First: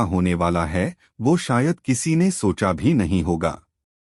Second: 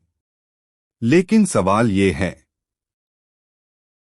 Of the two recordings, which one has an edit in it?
second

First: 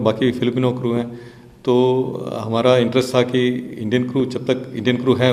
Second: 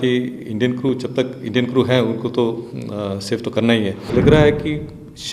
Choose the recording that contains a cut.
second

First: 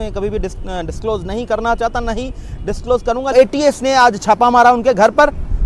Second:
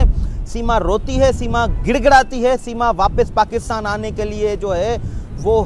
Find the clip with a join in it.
first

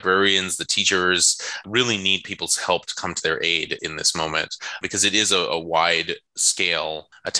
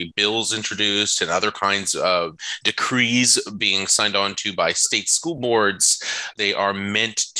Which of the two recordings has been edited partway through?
second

